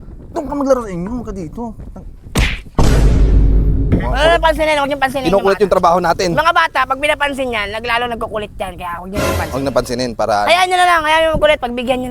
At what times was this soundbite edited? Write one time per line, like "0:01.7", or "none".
0:03.9